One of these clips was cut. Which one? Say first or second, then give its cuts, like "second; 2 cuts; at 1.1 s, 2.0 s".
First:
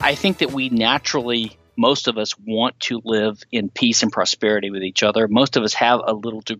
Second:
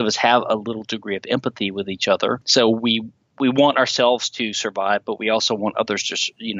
second; 1 cut; at 2.4 s